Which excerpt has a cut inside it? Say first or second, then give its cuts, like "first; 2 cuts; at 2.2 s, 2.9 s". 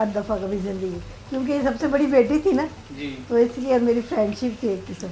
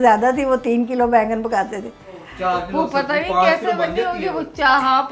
second; 1 cut; at 2.3 s